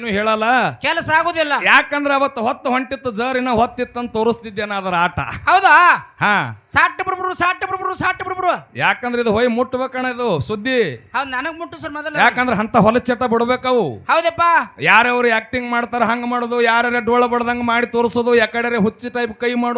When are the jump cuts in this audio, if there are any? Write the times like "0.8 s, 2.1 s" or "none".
none